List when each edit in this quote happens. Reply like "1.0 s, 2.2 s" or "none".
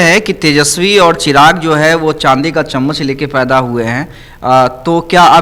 none

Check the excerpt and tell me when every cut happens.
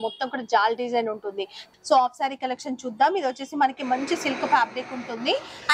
1.6 s

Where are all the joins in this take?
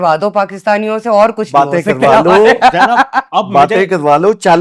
none

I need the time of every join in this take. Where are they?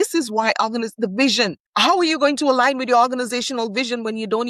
1.6 s

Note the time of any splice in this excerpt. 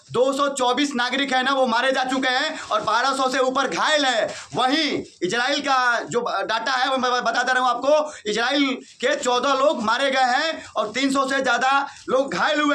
none

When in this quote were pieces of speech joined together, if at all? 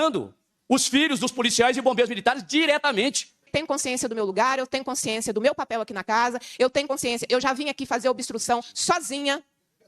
3.5 s

